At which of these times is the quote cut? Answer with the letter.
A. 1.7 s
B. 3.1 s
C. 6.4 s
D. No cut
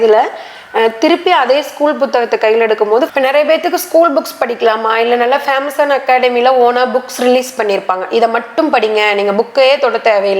B